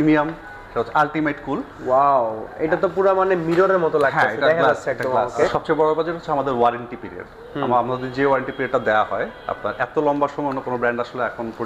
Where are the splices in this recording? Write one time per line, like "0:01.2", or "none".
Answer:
0:05.5